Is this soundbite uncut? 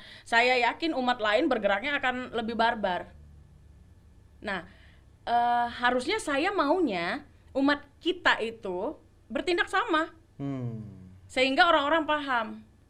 yes; 0 cuts

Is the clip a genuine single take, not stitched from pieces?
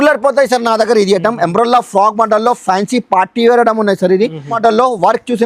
no; 1 cut; at 4.5 s

